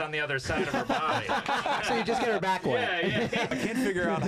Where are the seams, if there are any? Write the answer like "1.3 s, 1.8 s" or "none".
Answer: 1.8 s, 3.5 s